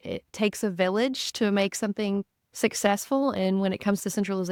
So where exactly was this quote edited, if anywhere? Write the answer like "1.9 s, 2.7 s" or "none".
none